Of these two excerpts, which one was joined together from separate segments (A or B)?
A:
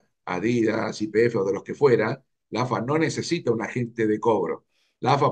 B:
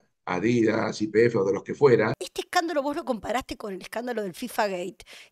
B